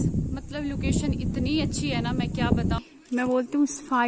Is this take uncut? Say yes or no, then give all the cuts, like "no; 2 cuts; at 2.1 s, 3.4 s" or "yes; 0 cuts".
no; 1 cut; at 2.8 s